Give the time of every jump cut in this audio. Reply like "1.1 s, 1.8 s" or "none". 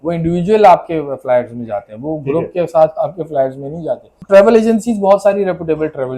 4.1 s